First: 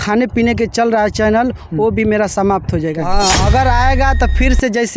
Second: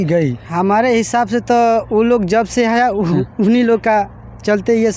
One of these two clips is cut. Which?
first; 1 cut; at 3.0 s

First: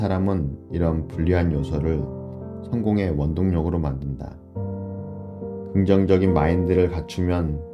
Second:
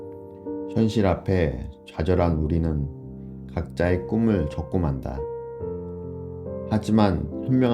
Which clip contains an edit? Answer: second; 3 cuts; at 0.7 s, 5.2 s, 6.7 s

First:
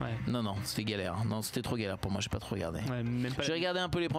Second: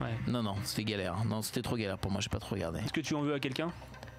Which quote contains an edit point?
second; 1 cut; at 2.8 s

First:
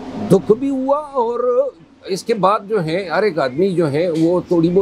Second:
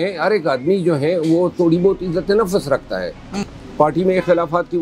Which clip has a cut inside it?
second; 1 cut; at 3.5 s

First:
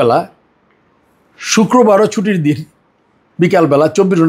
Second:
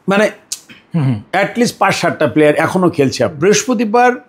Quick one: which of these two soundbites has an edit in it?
second; 1 cut; at 3.3 s

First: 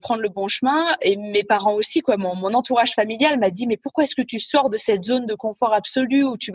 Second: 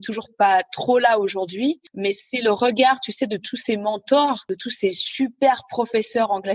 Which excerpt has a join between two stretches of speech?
second; 2 cuts; at 1.9 s, 4.5 s

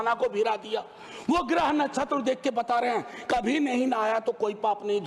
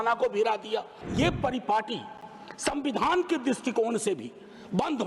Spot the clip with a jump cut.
second; 1 cut; at 1.0 s

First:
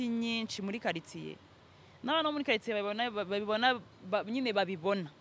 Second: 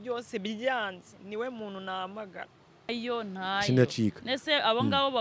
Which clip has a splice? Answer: second; 1 cut; at 2.9 s

